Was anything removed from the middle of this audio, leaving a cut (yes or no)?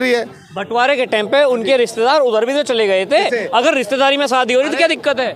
no